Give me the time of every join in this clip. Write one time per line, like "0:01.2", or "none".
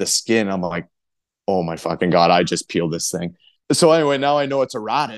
0:03.4